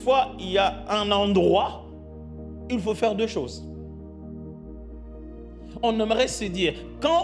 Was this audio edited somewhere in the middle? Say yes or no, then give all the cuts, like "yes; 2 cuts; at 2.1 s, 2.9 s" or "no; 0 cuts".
no; 0 cuts